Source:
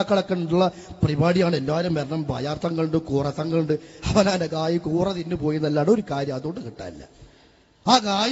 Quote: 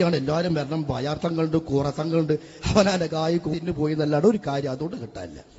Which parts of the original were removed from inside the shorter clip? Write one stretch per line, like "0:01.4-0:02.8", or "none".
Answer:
0:04.9-0:05.2